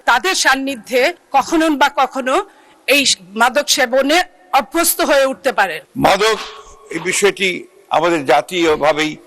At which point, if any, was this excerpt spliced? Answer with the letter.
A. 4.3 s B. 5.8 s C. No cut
B